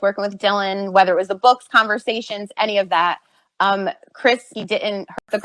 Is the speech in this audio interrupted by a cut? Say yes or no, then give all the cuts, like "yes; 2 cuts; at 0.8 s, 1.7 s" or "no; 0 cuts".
yes; 1 cut; at 4.5 s